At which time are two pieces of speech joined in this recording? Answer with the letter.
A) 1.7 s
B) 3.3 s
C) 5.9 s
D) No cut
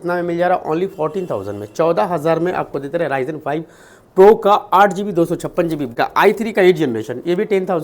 C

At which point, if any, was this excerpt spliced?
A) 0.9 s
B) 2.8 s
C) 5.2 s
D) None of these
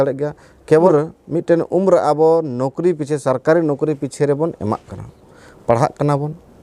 A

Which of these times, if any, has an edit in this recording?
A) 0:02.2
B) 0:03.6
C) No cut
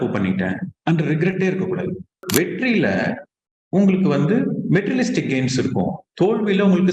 A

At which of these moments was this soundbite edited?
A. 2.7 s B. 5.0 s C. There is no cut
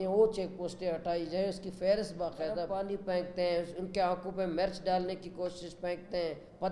A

